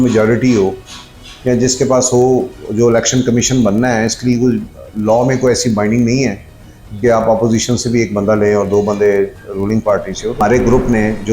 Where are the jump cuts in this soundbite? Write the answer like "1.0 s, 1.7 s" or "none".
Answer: 10.4 s